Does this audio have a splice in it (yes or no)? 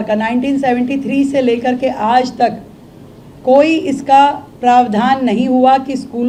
no